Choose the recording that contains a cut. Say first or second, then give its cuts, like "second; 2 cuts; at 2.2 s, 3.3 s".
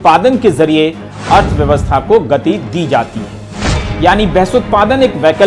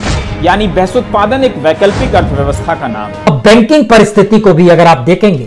second; 1 cut; at 3.2 s